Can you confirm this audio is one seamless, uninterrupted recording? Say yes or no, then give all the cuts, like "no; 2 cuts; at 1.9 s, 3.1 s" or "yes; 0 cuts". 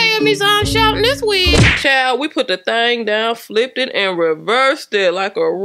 no; 1 cut; at 1.7 s